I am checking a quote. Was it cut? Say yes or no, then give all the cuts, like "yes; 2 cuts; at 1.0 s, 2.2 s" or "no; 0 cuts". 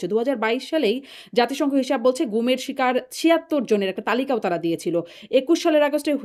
no; 0 cuts